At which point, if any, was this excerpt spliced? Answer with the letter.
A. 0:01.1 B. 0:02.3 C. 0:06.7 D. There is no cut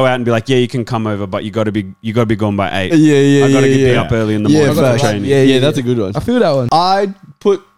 C